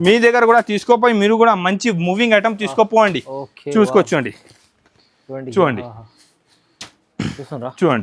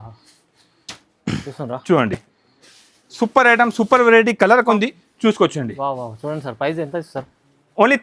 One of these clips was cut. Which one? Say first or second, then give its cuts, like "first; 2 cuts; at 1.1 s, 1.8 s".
second; 1 cut; at 4.7 s